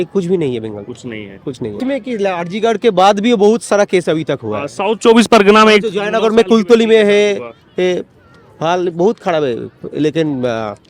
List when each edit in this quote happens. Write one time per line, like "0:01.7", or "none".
0:01.8